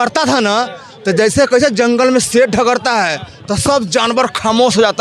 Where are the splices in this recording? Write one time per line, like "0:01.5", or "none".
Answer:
none